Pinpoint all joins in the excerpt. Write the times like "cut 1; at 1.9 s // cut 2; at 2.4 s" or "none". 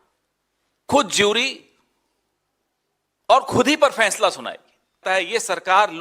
cut 1; at 5.0 s